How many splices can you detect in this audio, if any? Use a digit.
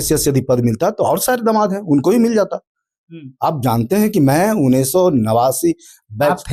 0